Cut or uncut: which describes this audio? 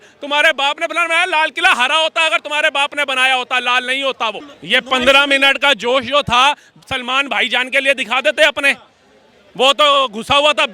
cut